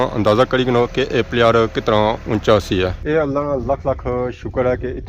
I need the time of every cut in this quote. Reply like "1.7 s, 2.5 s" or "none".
3.0 s